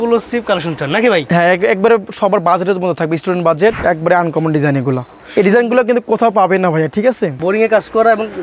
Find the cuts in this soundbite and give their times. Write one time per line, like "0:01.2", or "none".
0:03.8
0:05.1
0:07.4